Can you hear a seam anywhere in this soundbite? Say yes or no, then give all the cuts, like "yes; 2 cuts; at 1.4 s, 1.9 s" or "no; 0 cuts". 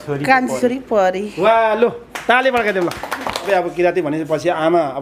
yes; 1 cut; at 3.5 s